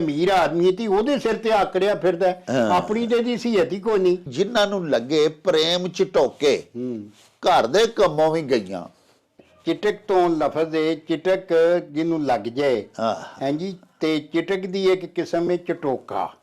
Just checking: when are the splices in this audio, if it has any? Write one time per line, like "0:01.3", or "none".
0:04.3